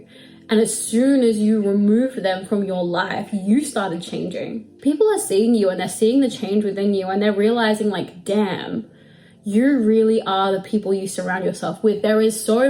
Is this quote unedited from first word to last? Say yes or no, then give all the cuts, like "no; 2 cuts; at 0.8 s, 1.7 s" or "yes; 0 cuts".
no; 1 cut; at 4.6 s